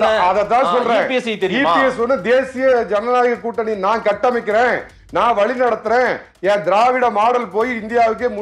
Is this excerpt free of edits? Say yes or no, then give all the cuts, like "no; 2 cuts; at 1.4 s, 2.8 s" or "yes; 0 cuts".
yes; 0 cuts